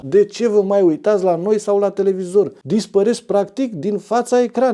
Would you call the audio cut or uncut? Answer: cut